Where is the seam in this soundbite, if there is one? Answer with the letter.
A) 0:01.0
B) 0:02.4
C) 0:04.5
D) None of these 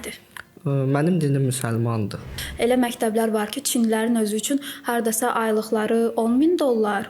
B